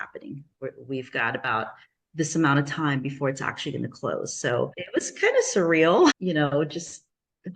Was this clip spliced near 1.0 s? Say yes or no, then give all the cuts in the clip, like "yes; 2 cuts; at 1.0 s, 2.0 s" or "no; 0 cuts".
no; 2 cuts; at 4.8 s, 6.2 s